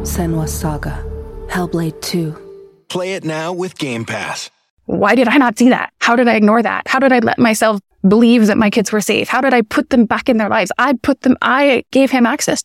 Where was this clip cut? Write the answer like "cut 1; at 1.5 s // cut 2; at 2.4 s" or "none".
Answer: cut 1; at 4.7 s // cut 2; at 5.9 s // cut 3; at 7.9 s // cut 4; at 11.9 s